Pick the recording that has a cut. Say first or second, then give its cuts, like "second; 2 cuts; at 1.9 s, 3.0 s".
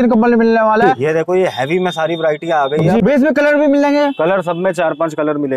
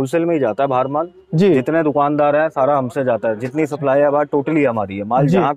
first; 2 cuts; at 0.9 s, 3.0 s